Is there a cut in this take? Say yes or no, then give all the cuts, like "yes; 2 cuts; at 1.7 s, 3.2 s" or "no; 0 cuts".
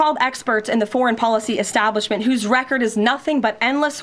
no; 0 cuts